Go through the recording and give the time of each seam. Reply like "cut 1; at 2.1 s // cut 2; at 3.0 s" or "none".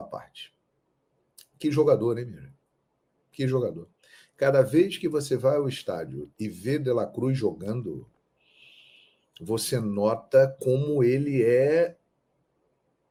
none